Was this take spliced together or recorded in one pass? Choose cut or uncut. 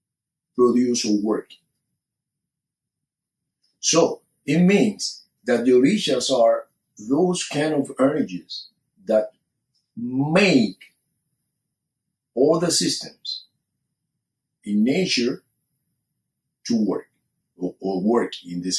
uncut